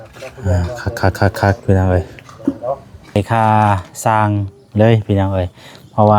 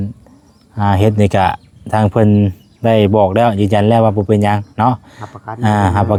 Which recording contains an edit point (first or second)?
first